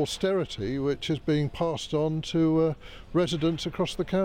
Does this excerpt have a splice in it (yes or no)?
no